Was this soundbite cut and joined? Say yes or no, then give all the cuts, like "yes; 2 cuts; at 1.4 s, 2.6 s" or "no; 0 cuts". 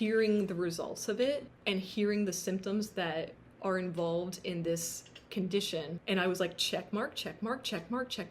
yes; 3 cuts; at 1.5 s, 3.4 s, 6.0 s